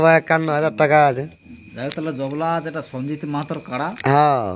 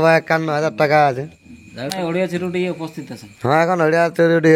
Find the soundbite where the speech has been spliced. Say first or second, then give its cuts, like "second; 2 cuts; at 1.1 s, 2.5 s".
second; 1 cut; at 2.0 s